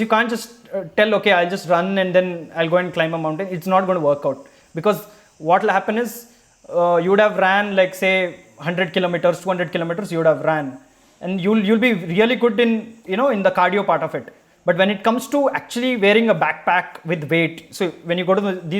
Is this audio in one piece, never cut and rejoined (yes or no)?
yes